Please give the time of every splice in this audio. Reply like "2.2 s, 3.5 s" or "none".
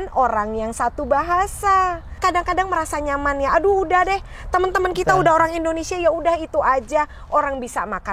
2.2 s

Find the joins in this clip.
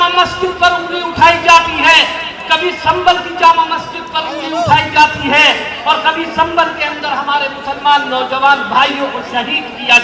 none

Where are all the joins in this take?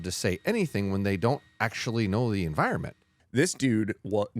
3.2 s

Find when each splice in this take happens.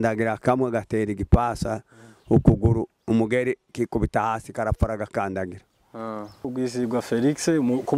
6.5 s

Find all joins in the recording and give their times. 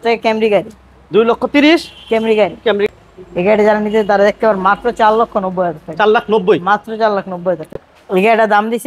2.9 s, 7.7 s

